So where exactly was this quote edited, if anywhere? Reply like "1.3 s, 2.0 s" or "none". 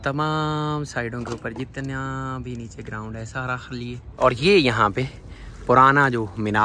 4.1 s